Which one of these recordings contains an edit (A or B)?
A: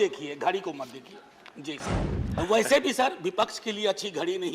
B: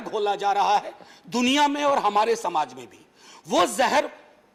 A